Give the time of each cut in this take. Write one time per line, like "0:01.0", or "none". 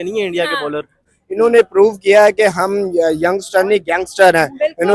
0:01.2